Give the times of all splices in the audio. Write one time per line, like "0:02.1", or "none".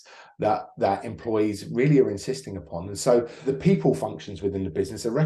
0:03.5